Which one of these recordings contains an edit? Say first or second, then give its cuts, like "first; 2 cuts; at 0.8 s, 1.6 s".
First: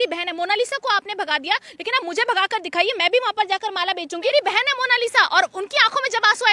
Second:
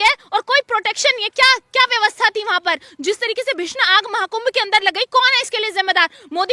first; 1 cut; at 4.3 s